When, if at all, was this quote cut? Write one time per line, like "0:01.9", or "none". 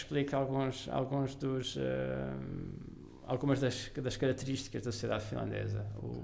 none